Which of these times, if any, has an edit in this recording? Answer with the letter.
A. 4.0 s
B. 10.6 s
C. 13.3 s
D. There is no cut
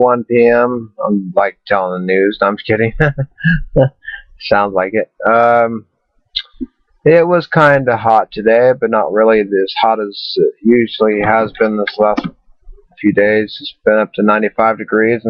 A